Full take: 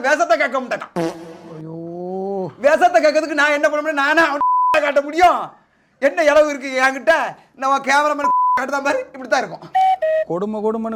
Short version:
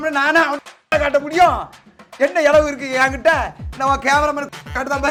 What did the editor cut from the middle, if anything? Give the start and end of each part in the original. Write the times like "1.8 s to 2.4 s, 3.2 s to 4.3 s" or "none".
none